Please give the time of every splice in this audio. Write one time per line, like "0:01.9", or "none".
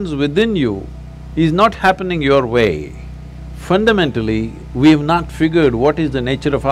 none